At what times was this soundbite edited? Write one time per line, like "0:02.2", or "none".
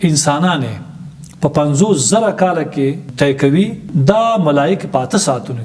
0:03.1
0:03.9

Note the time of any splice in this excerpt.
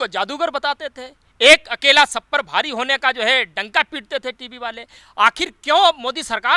none

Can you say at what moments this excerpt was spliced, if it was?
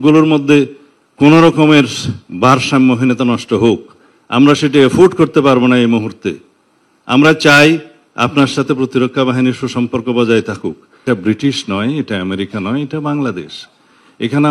0:11.0

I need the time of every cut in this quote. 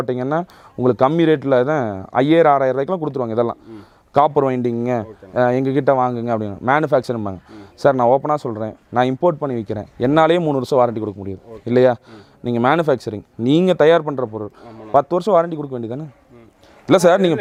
none

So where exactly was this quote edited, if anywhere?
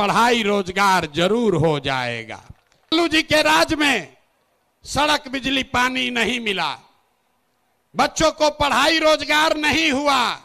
0:02.9

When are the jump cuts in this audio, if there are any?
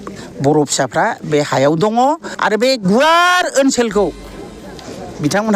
0:02.0

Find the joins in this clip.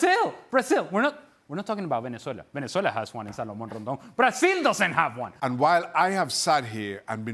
0:05.3

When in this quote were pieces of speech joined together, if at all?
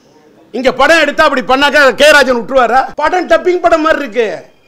0:02.9

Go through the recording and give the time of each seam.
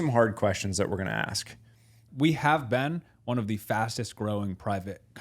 0:02.0

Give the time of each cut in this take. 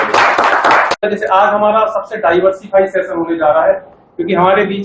0:01.0

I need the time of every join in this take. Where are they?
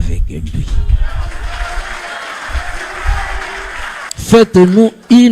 0:04.0

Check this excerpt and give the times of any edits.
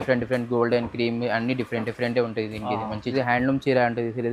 0:03.1

